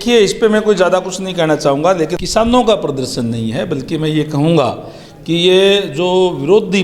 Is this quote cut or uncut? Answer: cut